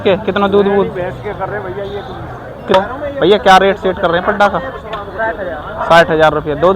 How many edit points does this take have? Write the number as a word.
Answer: one